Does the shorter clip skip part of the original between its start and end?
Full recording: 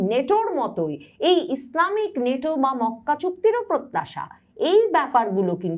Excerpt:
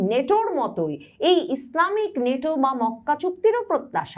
no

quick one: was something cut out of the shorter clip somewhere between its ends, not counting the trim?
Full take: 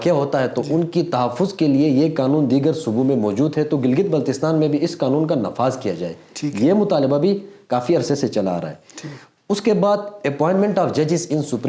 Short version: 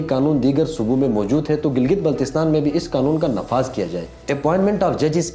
yes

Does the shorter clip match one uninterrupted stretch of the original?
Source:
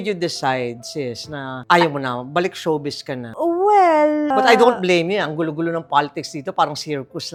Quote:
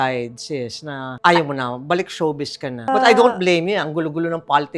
no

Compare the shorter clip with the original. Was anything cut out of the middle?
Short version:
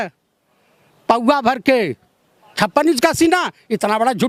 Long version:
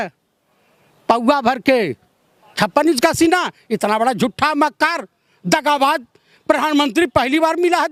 no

